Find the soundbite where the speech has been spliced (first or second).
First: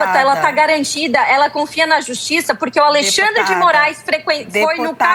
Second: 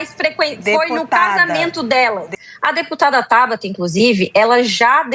second